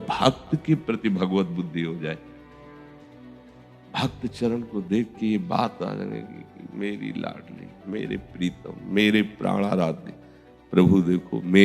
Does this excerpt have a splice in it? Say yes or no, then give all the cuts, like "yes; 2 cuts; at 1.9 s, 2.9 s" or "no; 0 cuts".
no; 0 cuts